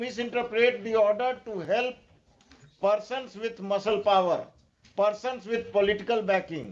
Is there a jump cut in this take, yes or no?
no